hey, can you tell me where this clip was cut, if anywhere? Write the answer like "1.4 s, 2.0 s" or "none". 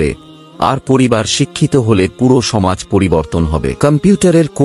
3.7 s